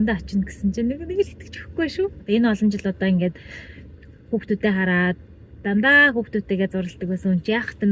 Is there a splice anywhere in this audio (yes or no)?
yes